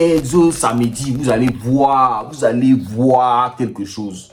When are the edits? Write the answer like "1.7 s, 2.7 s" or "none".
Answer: none